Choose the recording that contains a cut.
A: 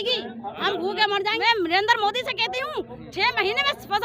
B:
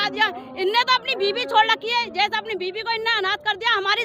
A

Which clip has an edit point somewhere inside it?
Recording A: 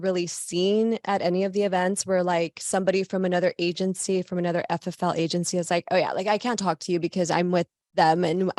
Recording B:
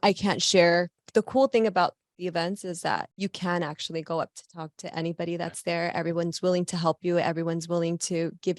B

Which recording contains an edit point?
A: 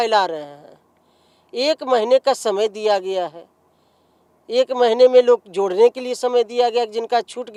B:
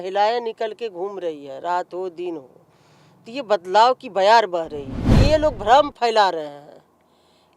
B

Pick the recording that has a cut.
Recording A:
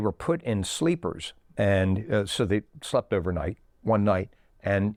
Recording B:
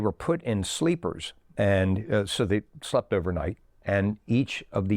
B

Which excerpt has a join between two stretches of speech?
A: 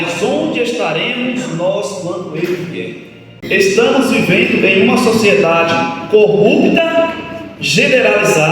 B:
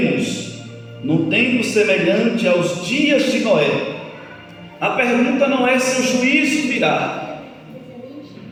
A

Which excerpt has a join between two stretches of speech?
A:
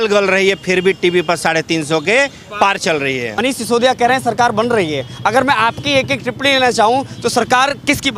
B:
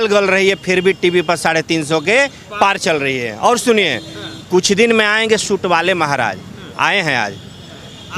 A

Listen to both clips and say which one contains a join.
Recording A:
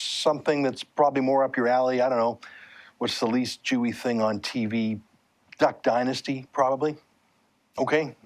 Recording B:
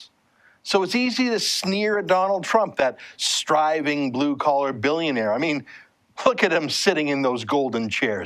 A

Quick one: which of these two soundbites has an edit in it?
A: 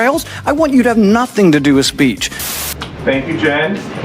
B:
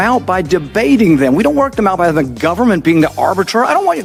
A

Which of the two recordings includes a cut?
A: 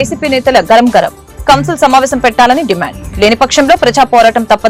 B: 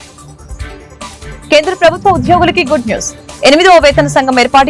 B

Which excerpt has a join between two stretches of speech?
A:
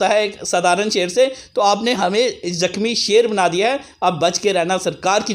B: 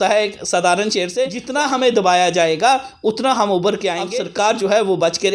B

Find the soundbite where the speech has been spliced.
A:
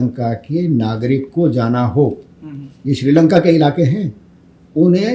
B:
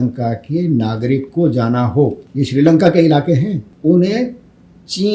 B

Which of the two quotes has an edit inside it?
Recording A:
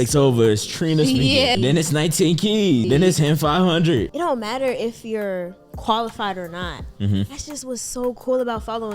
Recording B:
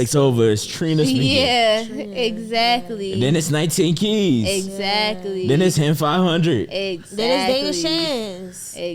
A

